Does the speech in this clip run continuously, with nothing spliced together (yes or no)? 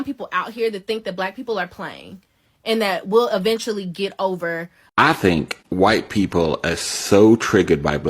no